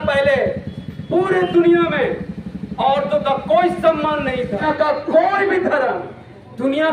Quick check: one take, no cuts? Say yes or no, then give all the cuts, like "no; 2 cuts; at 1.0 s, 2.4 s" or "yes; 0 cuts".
no; 1 cut; at 4.6 s